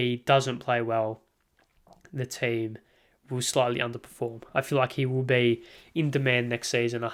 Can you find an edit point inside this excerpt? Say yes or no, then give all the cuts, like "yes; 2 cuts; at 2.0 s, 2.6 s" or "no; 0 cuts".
no; 0 cuts